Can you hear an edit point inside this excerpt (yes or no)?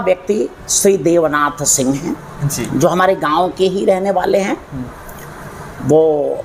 no